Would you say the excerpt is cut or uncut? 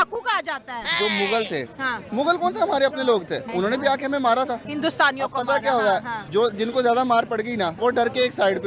cut